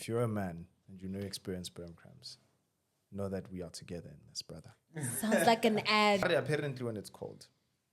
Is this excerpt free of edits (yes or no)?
no